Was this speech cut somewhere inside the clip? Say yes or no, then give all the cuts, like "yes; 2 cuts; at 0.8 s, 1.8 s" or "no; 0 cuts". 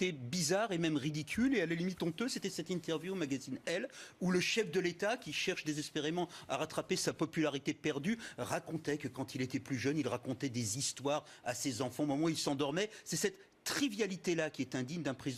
yes; 1 cut; at 5.3 s